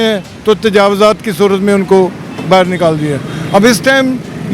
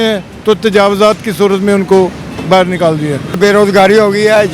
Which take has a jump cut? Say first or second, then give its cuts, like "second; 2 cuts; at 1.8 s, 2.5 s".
second; 1 cut; at 3.4 s